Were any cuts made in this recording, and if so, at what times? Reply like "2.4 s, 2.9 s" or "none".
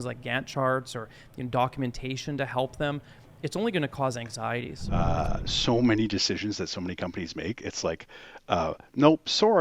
4.9 s